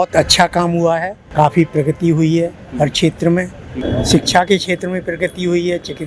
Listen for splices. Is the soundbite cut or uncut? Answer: cut